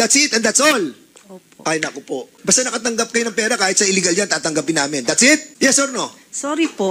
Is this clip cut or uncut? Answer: cut